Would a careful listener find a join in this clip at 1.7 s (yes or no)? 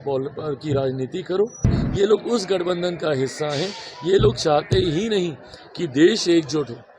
yes